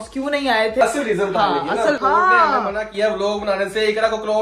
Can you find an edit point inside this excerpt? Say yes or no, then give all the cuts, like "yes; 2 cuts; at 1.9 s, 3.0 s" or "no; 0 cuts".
yes; 2 cuts; at 0.8 s, 2.0 s